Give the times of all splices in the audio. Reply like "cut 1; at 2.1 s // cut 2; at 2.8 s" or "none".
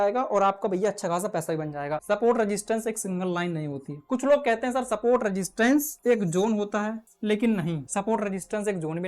cut 1; at 2.0 s // cut 2; at 5.9 s // cut 3; at 7.1 s // cut 4; at 7.8 s